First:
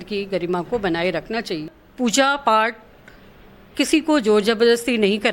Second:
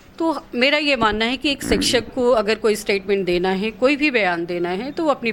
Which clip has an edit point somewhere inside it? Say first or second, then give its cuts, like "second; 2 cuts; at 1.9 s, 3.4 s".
first; 1 cut; at 1.8 s